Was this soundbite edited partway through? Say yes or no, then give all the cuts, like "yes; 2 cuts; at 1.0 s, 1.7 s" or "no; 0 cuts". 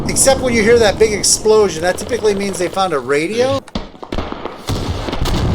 yes; 1 cut; at 3.6 s